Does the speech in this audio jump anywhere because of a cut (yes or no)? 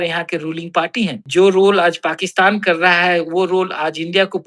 yes